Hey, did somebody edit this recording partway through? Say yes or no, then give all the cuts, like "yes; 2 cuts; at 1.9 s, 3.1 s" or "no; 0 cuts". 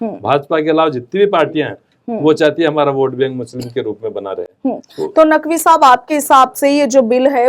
no; 0 cuts